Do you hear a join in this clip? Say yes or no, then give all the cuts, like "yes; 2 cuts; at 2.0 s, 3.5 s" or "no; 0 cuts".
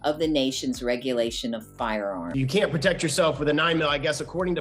yes; 1 cut; at 2.2 s